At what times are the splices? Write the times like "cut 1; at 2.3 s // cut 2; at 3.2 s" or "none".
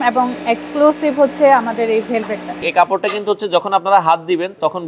cut 1; at 2.5 s